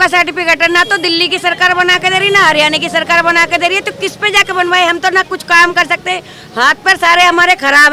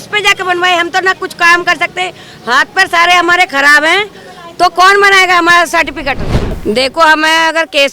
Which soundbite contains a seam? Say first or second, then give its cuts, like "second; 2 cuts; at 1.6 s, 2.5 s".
second; 1 cut; at 6.5 s